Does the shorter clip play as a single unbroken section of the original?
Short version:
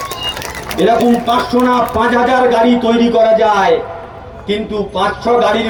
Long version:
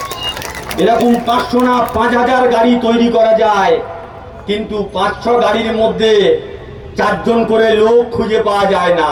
yes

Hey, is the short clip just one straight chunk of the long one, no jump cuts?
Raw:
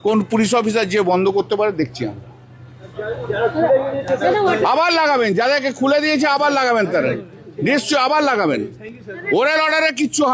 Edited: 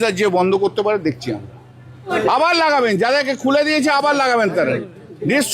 no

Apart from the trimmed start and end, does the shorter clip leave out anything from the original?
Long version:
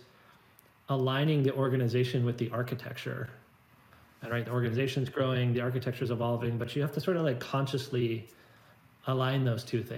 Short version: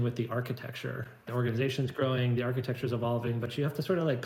yes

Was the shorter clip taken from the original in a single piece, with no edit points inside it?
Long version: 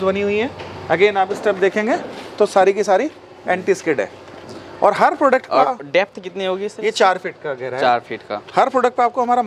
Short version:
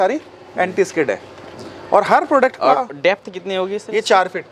yes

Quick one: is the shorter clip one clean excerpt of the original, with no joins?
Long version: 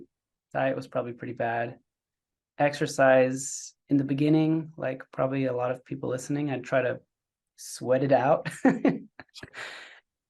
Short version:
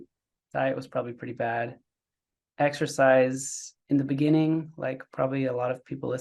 yes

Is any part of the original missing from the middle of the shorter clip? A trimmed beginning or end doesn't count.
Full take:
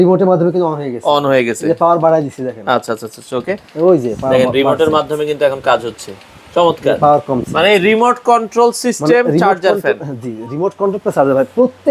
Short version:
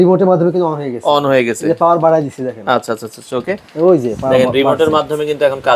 no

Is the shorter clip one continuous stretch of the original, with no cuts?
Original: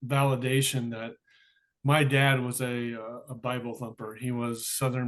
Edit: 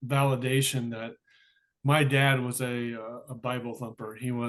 yes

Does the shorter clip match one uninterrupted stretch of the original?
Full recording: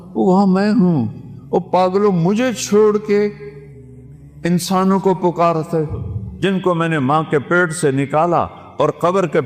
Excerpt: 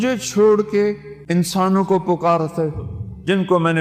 no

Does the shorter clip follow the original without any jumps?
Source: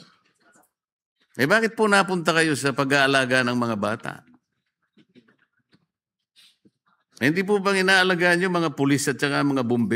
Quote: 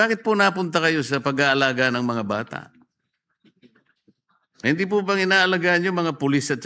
no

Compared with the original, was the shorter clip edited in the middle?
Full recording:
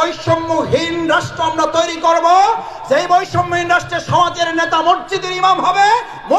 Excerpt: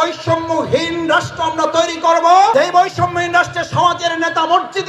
yes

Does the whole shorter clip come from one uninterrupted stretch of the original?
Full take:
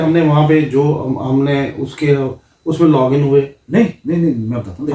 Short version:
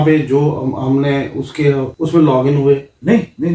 no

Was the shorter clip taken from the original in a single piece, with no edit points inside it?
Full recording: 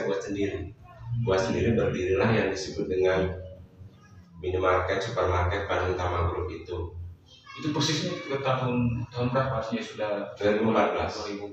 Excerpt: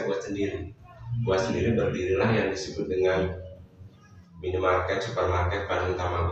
yes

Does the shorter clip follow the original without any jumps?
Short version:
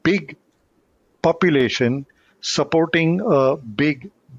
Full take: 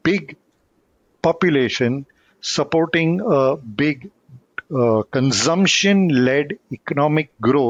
yes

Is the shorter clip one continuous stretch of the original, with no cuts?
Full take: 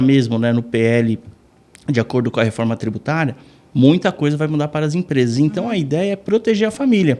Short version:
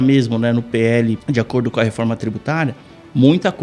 no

